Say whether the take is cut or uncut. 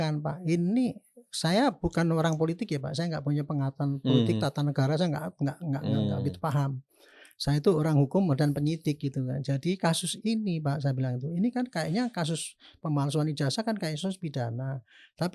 uncut